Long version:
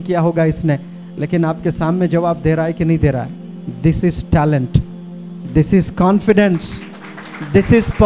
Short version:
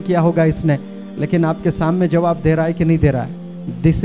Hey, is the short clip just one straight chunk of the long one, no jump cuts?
yes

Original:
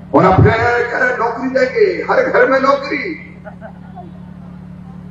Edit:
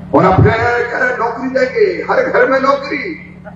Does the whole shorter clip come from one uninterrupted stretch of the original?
yes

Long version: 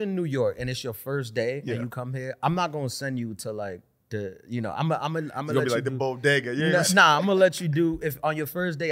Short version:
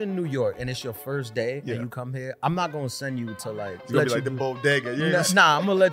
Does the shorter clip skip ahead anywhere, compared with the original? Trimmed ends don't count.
yes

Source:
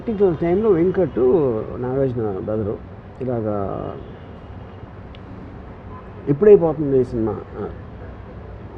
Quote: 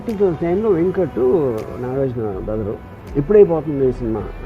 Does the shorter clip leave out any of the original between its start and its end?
yes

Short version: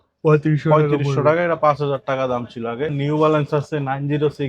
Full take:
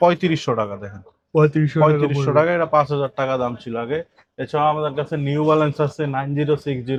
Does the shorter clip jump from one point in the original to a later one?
yes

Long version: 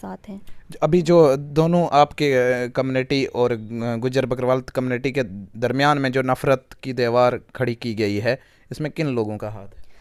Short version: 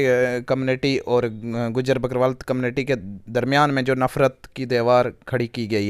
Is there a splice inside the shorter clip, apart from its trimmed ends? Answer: no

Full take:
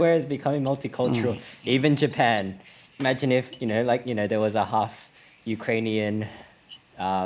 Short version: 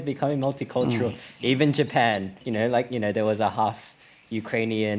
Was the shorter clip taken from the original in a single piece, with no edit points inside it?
no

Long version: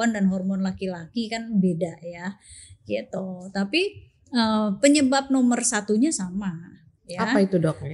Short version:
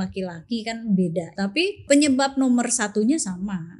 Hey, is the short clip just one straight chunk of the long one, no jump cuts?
no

